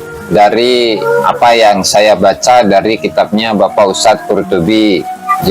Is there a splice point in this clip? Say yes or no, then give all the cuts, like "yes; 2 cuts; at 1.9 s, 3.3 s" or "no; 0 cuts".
yes; 1 cut; at 1.0 s